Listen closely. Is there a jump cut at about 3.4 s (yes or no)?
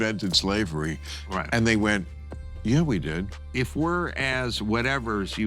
yes